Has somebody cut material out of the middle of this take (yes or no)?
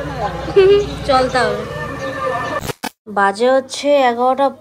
no